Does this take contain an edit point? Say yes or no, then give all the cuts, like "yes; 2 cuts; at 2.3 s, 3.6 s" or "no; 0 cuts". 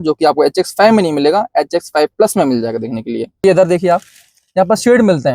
yes; 1 cut; at 3.4 s